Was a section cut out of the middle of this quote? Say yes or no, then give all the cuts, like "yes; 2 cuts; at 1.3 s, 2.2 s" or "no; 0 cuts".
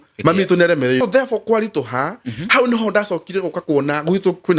yes; 1 cut; at 1.0 s